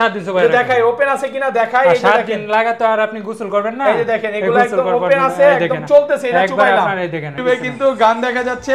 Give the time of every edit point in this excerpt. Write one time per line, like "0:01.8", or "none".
0:07.3